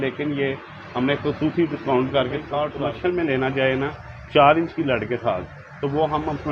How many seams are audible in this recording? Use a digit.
1